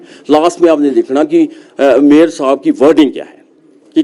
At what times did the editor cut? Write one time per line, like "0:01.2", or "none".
none